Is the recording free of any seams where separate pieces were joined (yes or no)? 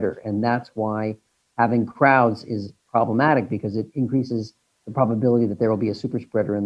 yes